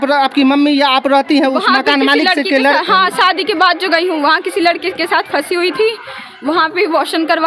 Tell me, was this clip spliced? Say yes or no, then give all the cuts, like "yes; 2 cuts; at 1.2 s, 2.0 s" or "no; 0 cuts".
no; 0 cuts